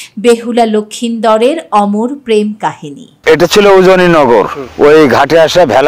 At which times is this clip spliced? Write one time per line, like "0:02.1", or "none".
0:03.2
0:04.7